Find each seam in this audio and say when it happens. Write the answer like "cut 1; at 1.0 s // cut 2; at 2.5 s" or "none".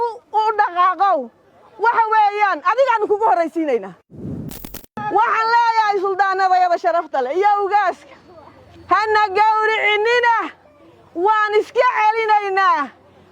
cut 1; at 4.4 s